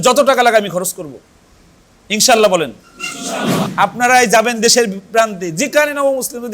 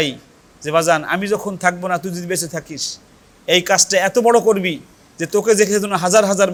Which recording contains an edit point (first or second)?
first